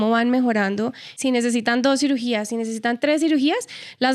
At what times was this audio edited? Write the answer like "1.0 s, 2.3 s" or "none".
1.2 s